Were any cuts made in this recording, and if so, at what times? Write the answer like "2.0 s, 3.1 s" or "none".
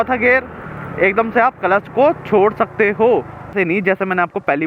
3.5 s